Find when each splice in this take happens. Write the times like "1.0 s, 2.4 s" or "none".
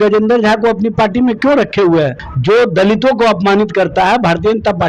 2.2 s